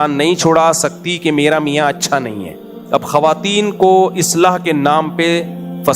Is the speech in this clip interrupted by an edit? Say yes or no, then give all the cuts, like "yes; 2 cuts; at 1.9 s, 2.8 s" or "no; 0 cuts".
yes; 1 cut; at 2.6 s